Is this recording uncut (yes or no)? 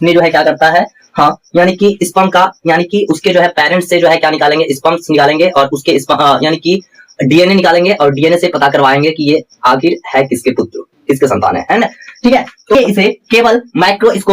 no